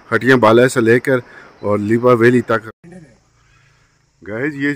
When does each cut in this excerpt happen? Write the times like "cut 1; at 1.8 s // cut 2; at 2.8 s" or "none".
cut 1; at 2.4 s